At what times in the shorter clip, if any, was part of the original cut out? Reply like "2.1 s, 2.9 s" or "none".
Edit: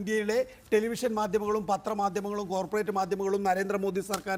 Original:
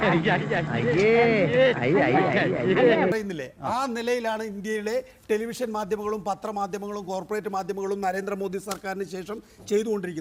none